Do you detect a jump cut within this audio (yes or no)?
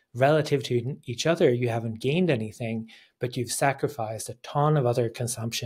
no